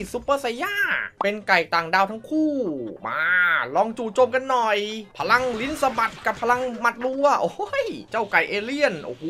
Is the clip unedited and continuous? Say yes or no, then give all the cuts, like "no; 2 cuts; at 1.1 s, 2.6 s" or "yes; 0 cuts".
no; 3 cuts; at 1.0 s, 5.1 s, 8.0 s